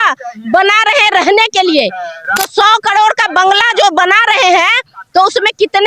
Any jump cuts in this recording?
no; 0 cuts

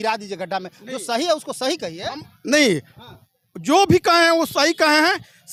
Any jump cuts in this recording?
no; 0 cuts

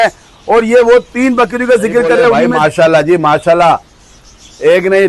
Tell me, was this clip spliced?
yes; 1 cut; at 2.5 s

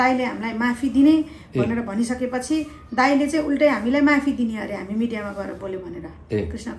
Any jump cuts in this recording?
no; 0 cuts

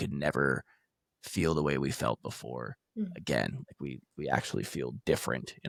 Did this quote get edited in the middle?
no; 0 cuts

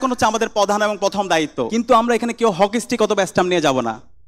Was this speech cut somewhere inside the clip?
yes; 1 cut; at 1.7 s

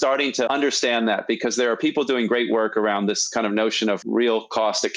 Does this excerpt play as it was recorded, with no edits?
yes; 0 cuts

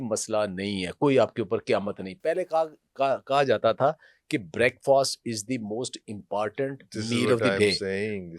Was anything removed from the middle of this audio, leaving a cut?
no; 0 cuts

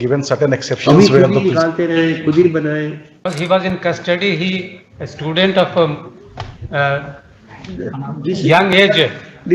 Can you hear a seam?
yes; 1 cut; at 3.3 s

